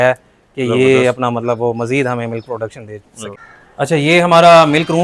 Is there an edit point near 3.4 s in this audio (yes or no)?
yes